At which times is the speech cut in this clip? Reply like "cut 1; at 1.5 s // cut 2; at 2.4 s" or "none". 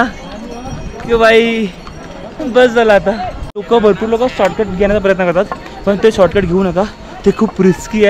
cut 1; at 3.7 s